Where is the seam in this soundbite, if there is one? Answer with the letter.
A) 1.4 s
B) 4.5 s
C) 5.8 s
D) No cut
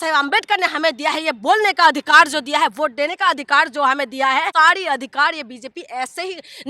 B